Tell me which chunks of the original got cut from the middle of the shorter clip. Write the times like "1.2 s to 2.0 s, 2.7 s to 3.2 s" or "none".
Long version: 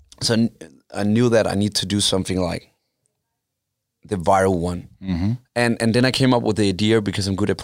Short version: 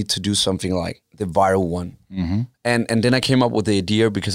2.7 s to 3.9 s

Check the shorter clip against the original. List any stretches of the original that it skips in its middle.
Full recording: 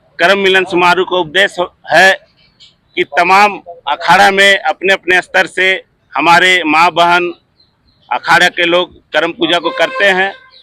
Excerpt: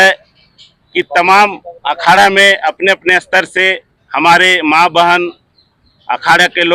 none

